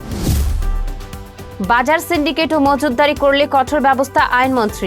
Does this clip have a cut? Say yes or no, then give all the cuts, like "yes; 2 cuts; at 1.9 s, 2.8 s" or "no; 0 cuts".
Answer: no; 0 cuts